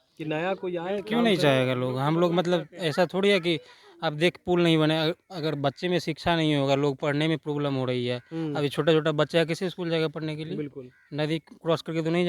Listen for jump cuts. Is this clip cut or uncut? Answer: uncut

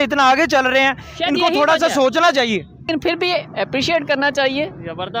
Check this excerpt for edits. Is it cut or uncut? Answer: cut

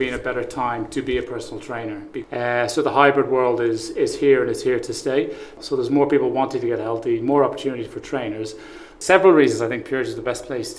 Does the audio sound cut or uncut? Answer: cut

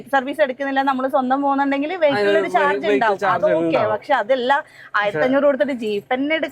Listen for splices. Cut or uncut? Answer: uncut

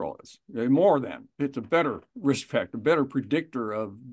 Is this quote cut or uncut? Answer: cut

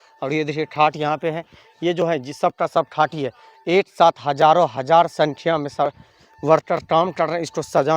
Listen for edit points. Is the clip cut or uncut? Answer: uncut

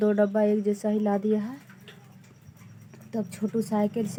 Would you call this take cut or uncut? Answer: uncut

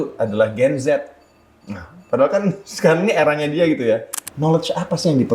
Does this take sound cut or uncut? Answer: cut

